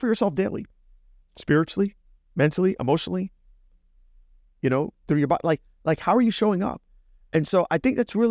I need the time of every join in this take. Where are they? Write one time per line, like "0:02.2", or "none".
none

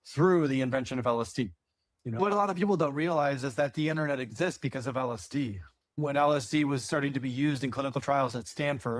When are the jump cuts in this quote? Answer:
0:02.2
0:06.0

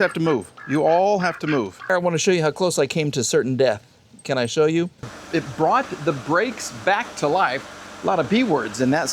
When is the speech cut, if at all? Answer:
0:01.9
0:05.2

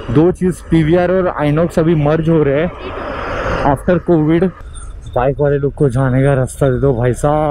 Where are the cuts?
0:04.6

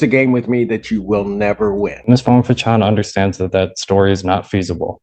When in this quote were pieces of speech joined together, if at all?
0:02.0

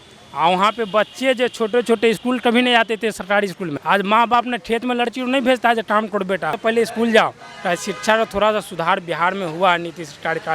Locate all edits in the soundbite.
0:03.7
0:06.6

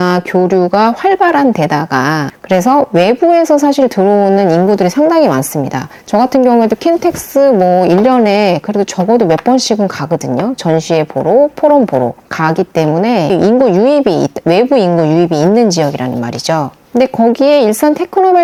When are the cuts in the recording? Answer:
none

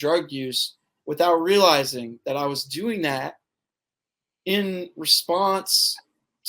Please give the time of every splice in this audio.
none

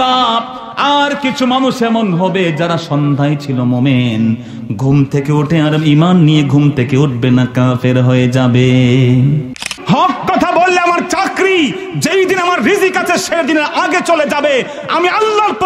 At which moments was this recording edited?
0:09.6

